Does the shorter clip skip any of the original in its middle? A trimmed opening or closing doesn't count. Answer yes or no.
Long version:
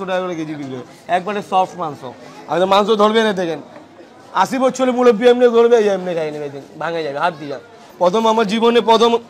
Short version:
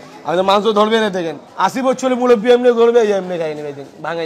yes